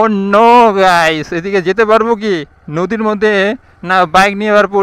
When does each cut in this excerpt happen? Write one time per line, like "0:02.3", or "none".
none